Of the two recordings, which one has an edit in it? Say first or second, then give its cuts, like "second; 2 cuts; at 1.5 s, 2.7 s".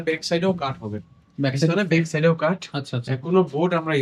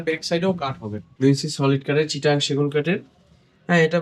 second; 1 cut; at 1.1 s